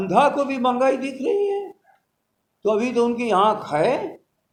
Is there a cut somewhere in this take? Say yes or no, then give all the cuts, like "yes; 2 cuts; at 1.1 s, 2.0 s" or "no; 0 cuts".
no; 0 cuts